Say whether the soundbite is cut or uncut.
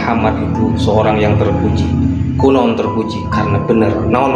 uncut